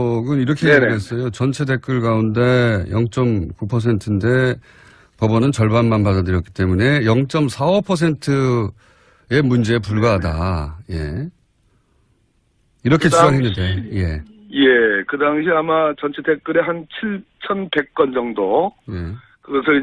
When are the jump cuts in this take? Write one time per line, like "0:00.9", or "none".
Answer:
none